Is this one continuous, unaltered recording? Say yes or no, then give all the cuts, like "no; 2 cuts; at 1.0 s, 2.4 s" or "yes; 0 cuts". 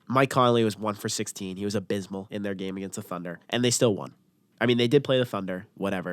no; 2 cuts; at 2.3 s, 3.4 s